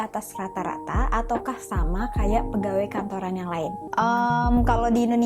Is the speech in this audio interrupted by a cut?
yes; 1 cut; at 3.9 s

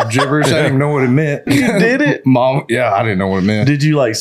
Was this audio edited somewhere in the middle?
yes; 1 cut; at 1.5 s

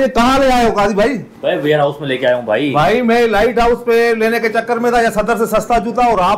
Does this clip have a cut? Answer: no; 0 cuts

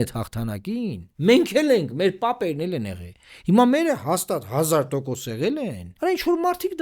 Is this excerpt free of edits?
no; 2 cuts; at 1.1 s, 5.8 s

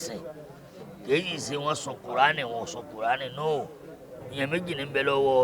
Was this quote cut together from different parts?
yes; 1 cut; at 4.2 s

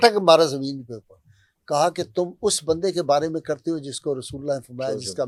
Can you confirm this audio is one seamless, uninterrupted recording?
yes; 0 cuts

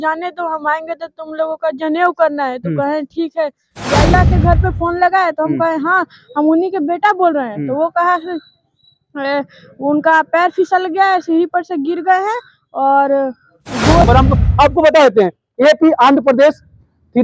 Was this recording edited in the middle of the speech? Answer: yes; 2 cuts; at 4.1 s, 14.0 s

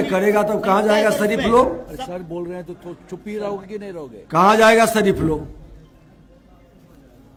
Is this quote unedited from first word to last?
yes; 0 cuts

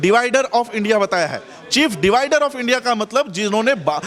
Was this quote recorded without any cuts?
yes; 0 cuts

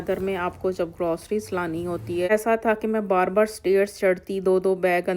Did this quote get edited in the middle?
yes; 1 cut; at 2.3 s

